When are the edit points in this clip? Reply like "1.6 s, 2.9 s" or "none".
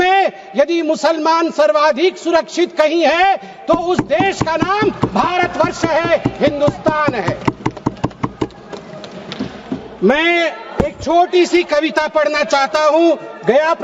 none